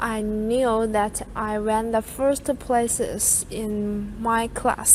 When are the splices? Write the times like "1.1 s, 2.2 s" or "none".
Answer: none